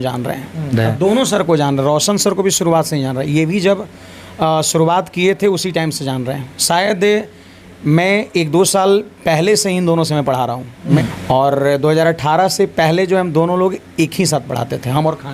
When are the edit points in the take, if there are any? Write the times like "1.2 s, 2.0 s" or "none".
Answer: 0.7 s, 11.0 s